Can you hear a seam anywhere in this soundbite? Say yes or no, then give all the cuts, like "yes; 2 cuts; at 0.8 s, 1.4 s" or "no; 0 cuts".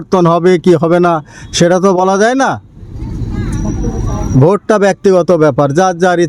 no; 0 cuts